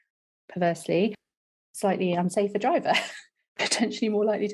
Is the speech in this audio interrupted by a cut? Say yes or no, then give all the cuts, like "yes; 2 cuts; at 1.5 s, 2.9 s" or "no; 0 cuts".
no; 0 cuts